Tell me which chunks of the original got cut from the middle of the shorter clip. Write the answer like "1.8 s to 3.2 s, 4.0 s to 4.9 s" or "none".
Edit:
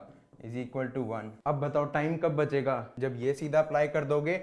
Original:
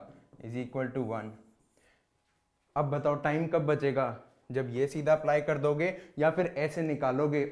1.3 s to 2.6 s, 4.2 s to 4.4 s

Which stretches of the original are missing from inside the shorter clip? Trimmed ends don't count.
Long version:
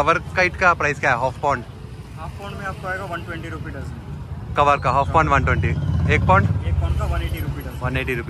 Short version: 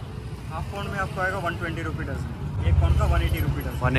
4.3 s to 6.7 s

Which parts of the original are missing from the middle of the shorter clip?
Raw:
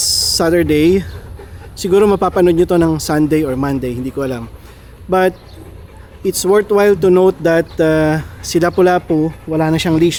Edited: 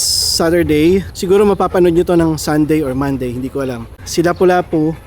1.1 s to 1.7 s, 4.6 s to 8.3 s

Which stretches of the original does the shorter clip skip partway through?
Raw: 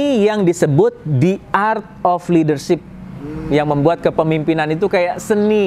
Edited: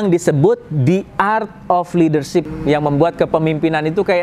2.9 s to 3.4 s

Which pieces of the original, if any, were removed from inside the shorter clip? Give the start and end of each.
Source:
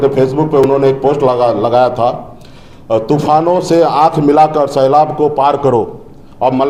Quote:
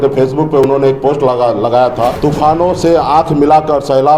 2.2 s to 3.0 s

